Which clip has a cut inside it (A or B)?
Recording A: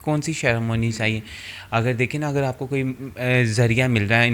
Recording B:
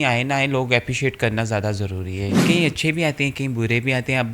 B